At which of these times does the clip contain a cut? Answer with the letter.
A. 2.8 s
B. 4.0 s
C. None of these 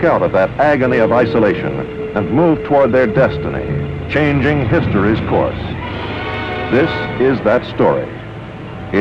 C